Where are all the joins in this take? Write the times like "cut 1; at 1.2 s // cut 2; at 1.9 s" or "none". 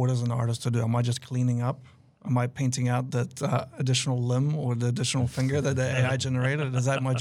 none